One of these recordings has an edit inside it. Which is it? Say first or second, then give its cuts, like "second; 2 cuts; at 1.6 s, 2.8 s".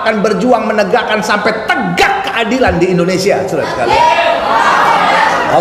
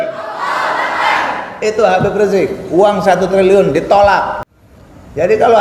second; 1 cut; at 4.4 s